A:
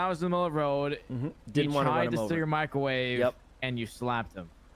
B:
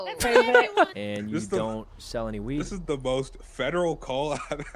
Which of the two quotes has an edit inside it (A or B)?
B